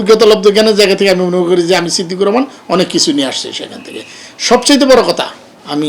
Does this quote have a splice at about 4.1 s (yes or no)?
no